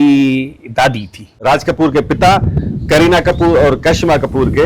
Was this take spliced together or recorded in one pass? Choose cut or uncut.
cut